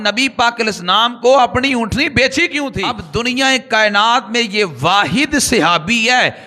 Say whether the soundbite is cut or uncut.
cut